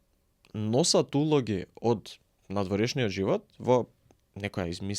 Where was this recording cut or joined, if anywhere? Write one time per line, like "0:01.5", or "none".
none